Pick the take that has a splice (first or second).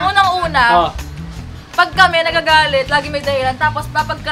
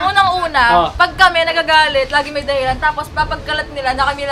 second